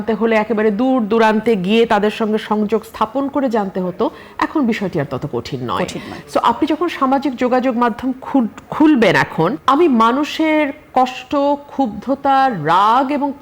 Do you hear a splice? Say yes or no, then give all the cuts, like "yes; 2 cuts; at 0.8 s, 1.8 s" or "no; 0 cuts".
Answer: yes; 1 cut; at 9.6 s